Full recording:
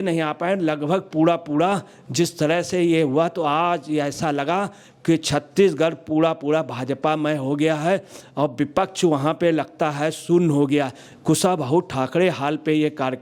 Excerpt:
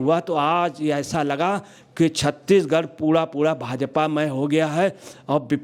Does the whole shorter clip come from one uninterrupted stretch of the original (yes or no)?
yes